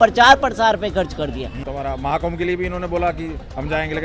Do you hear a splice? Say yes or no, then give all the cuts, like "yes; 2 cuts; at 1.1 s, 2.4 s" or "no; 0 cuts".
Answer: yes; 1 cut; at 1.6 s